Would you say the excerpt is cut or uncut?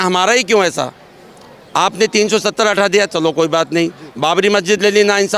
uncut